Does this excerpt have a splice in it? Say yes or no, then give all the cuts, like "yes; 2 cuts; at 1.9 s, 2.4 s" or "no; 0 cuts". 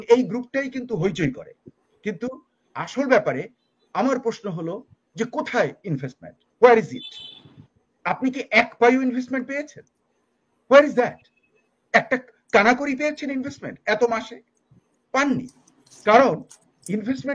no; 0 cuts